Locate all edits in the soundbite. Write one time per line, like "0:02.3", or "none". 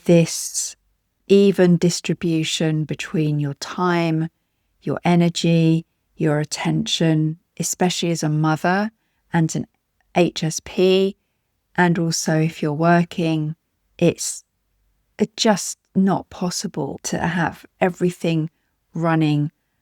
0:17.0